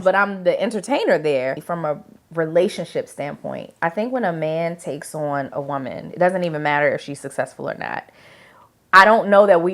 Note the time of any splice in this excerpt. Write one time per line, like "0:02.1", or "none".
0:01.7